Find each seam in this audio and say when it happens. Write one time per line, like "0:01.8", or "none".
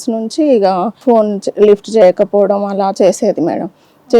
0:01.0